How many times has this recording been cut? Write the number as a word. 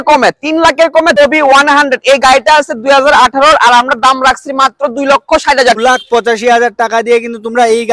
two